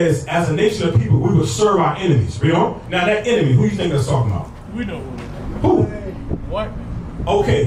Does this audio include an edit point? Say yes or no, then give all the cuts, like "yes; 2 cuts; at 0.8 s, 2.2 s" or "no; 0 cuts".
no; 0 cuts